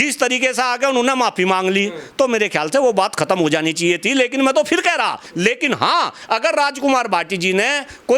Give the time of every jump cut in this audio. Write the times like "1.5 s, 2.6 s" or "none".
5.2 s